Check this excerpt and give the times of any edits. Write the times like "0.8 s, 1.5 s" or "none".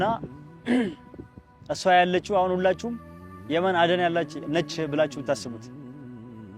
5.6 s